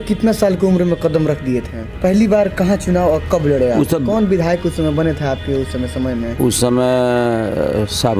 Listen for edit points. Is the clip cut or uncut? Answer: cut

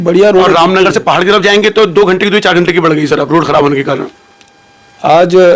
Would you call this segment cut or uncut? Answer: uncut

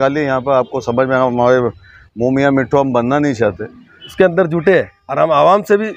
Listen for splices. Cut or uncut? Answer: cut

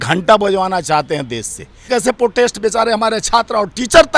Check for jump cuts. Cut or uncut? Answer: cut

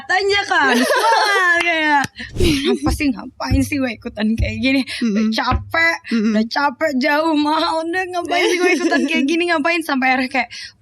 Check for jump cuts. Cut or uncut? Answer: cut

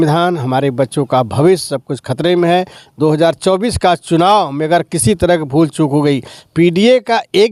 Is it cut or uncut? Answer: uncut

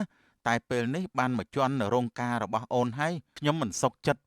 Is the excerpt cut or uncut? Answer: cut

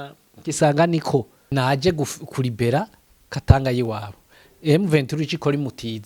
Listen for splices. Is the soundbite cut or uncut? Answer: cut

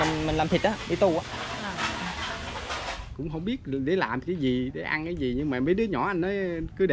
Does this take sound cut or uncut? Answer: cut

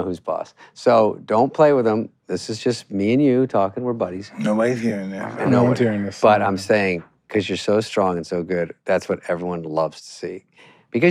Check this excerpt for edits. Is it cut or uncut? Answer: uncut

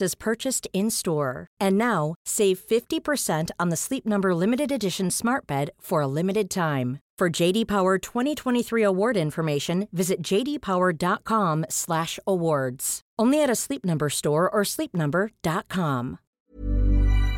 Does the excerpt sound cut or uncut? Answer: cut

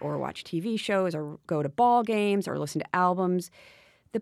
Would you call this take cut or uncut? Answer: cut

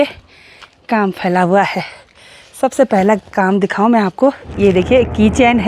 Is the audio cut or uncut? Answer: cut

